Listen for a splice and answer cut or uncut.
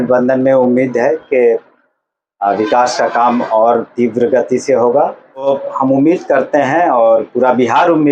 cut